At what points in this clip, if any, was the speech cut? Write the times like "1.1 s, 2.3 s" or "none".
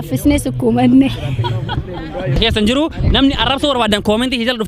2.4 s